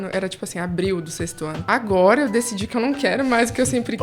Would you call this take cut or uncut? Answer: cut